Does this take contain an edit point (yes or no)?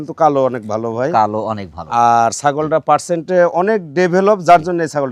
no